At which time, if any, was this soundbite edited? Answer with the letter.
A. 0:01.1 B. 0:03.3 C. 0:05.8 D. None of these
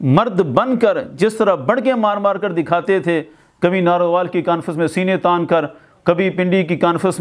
D